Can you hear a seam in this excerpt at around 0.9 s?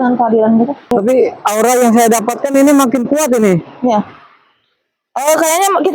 yes; 1 cut; at 0.9 s

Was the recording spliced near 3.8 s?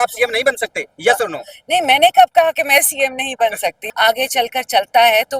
yes; 1 cut; at 3.8 s

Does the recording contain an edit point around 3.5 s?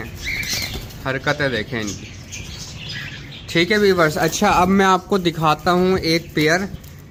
no; 0 cuts

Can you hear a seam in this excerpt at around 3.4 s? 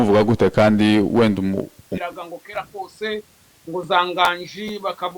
no; 1 cut; at 1.9 s

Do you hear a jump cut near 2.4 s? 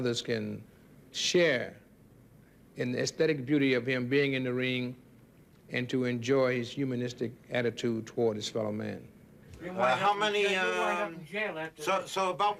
no; 0 cuts

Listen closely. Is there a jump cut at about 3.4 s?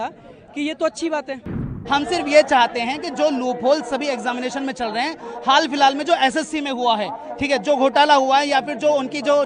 no; 1 cut; at 1.7 s

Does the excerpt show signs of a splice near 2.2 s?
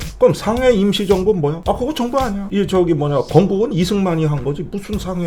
no; 0 cuts

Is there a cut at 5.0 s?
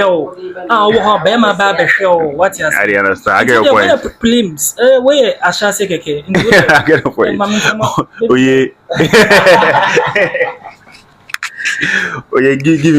no; 0 cuts

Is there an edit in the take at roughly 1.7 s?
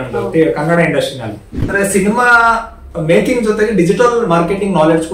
yes; 1 cut; at 1.7 s

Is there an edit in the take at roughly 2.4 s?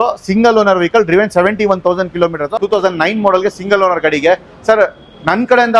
yes; 1 cut; at 2.4 s

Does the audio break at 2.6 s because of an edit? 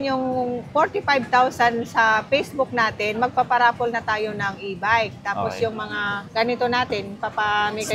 no; 0 cuts

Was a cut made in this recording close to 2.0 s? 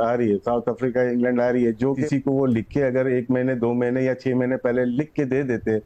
yes; 1 cut; at 2.0 s

